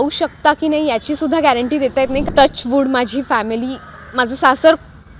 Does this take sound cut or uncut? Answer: cut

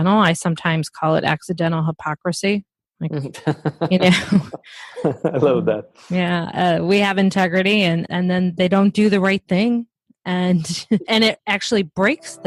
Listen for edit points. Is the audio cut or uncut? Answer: uncut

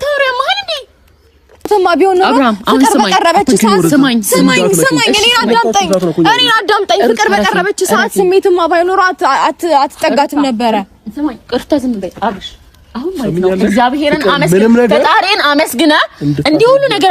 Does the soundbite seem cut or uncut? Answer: cut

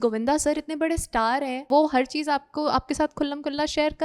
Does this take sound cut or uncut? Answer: cut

